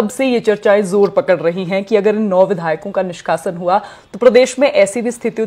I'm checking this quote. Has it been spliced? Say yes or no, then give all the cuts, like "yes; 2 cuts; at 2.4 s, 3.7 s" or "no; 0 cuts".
no; 0 cuts